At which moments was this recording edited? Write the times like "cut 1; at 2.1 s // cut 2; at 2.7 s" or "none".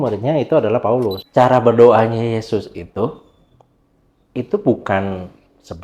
cut 1; at 1.2 s